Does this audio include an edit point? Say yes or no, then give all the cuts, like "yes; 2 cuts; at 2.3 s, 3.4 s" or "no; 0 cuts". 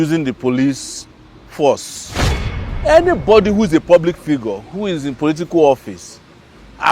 yes; 1 cut; at 2.5 s